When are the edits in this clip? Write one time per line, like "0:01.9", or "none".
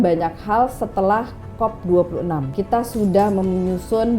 0:02.5